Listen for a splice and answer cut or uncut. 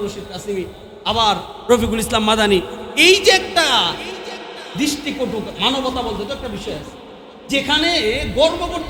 uncut